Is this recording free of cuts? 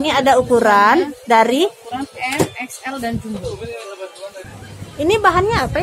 no; 1 cut; at 4.4 s

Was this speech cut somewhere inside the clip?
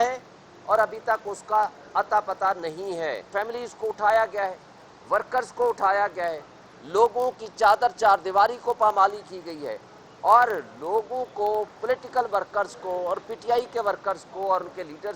yes; 1 cut; at 3.3 s

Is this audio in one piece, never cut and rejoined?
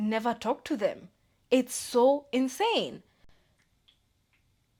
yes; 0 cuts

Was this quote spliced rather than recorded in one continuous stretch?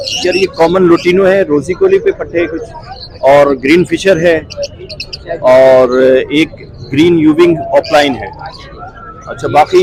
no; 0 cuts

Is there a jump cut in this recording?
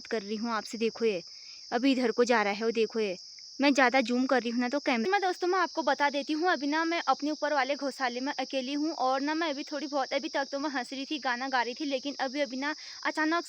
yes; 1 cut; at 5.0 s

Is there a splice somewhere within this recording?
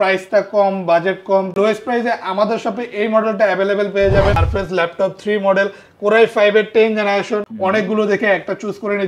yes; 3 cuts; at 1.5 s, 4.3 s, 7.5 s

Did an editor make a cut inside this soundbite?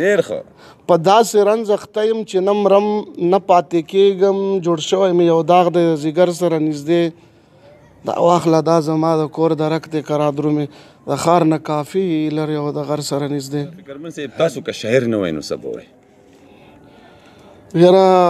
yes; 1 cut; at 14.2 s

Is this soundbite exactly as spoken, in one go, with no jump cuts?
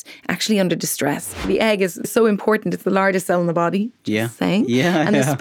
no; 1 cut; at 1.3 s

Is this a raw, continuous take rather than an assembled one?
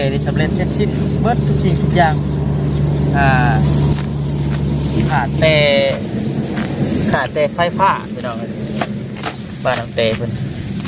yes; 0 cuts

